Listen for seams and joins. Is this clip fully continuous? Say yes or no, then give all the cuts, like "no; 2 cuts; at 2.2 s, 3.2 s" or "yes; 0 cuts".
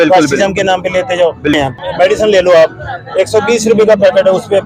no; 1 cut; at 1.6 s